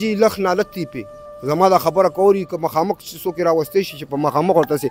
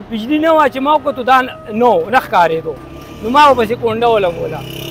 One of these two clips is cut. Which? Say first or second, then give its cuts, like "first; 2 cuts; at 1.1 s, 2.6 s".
first; 1 cut; at 1.3 s